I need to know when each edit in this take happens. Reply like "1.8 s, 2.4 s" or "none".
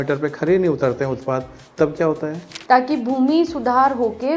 2.5 s